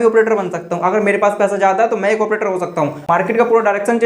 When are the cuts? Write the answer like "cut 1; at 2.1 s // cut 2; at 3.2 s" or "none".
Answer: cut 1; at 3.0 s